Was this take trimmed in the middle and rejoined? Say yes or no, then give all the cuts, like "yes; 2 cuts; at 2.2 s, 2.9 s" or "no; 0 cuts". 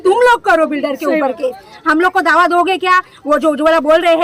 no; 0 cuts